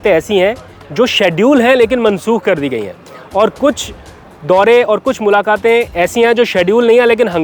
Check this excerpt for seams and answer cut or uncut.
uncut